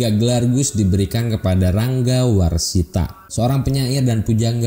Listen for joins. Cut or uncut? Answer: uncut